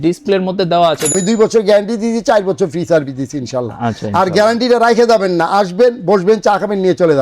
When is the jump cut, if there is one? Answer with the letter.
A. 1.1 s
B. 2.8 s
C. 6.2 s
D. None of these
A